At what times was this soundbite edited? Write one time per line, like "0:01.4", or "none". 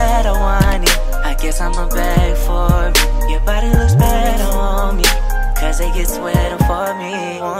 none